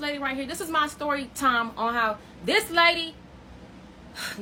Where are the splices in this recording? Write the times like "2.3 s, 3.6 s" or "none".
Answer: none